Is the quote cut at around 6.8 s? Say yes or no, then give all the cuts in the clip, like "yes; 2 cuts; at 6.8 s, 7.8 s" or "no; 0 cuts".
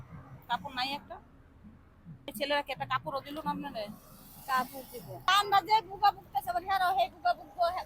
no; 2 cuts; at 2.3 s, 5.3 s